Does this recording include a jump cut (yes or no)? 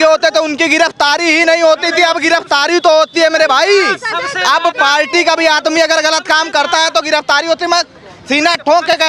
no